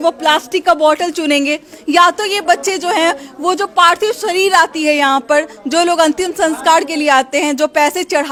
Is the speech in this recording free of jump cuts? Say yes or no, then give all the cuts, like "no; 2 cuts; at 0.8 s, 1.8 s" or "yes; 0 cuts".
yes; 0 cuts